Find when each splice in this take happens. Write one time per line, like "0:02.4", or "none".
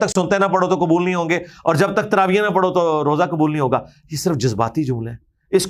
none